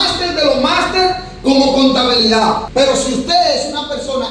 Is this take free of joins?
no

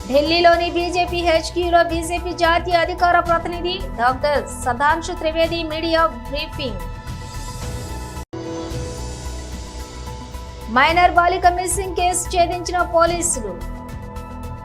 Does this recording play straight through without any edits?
no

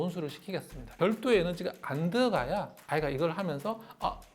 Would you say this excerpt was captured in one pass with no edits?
no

